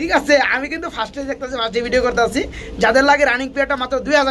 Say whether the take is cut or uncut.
uncut